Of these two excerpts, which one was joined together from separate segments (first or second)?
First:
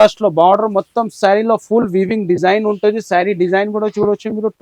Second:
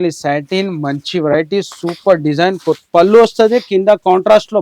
second